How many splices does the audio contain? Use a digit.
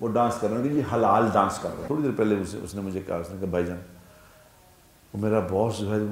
1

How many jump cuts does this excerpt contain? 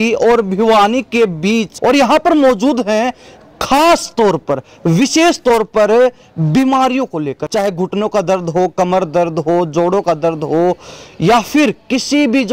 2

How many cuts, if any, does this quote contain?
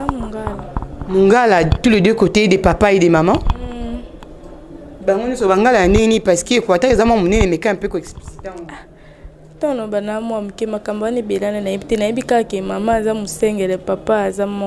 0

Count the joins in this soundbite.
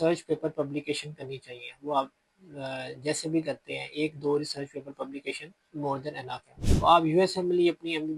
1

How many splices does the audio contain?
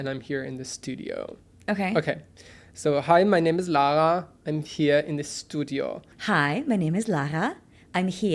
1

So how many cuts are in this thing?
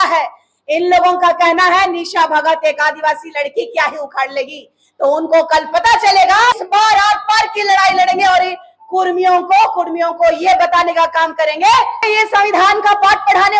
2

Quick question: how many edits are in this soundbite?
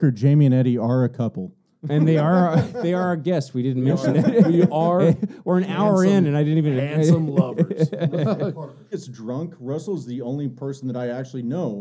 1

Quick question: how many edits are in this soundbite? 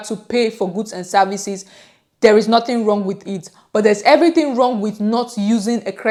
0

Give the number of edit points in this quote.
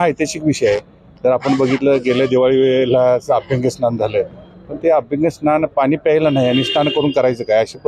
0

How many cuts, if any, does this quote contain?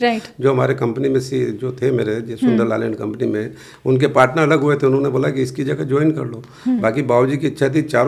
0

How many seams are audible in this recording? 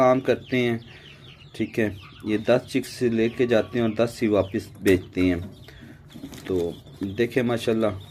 0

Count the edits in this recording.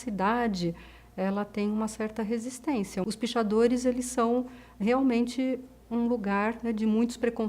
1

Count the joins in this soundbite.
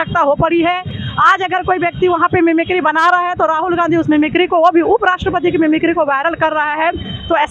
0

